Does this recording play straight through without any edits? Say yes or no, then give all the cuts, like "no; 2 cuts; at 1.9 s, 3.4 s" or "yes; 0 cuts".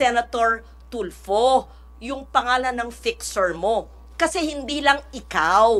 no; 1 cut; at 4.0 s